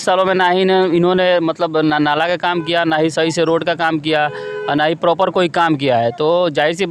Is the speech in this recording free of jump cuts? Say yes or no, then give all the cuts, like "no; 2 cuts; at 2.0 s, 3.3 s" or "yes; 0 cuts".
yes; 0 cuts